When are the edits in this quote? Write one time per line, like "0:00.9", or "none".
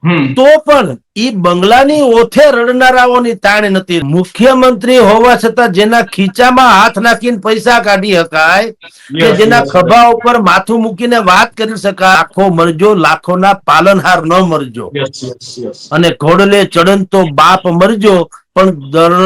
0:04.0
0:12.2